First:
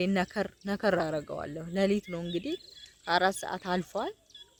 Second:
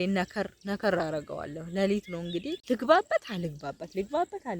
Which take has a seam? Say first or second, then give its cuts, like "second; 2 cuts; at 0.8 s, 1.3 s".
second; 1 cut; at 2.6 s